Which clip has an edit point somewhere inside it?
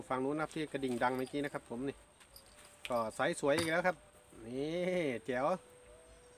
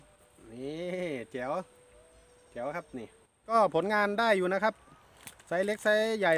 second; 1 cut; at 3.4 s

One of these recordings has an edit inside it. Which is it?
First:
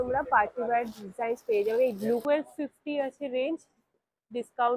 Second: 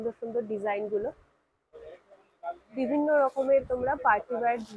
first; 1 cut; at 2.2 s

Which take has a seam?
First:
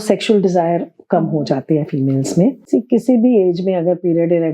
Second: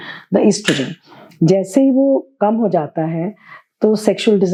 first; 1 cut; at 2.6 s

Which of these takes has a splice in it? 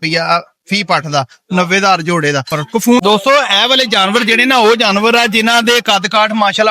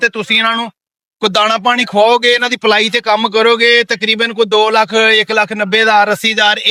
first; 1 cut; at 3.0 s

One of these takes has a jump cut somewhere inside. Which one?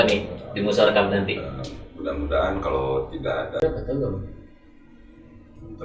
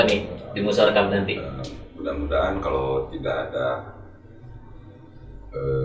first; 1 cut; at 3.6 s

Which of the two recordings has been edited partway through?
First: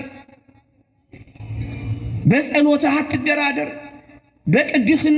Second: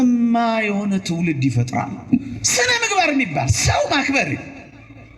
second; 1 cut; at 2.1 s

